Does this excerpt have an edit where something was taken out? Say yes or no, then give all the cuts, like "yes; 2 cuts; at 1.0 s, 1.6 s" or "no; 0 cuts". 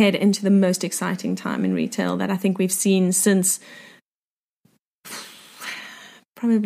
no; 0 cuts